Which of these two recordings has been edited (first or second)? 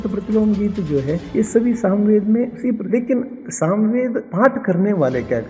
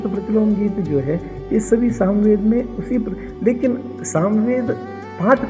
first